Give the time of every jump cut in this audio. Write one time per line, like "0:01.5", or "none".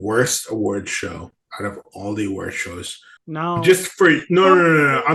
0:03.0